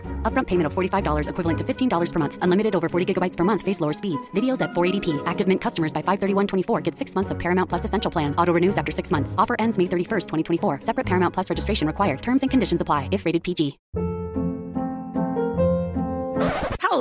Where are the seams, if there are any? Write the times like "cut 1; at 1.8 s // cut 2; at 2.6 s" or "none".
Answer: cut 1; at 13.8 s